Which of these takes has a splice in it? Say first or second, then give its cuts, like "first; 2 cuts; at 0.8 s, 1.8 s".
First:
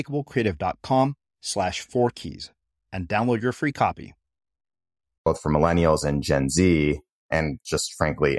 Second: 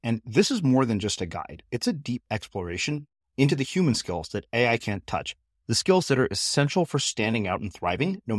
first; 2 cuts; at 5.3 s, 7.3 s